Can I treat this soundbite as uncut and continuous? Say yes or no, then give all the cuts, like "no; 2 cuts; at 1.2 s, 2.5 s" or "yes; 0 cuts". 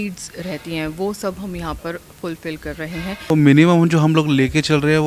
no; 1 cut; at 3.3 s